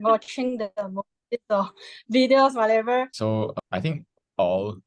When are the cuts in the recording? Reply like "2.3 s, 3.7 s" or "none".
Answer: 3.3 s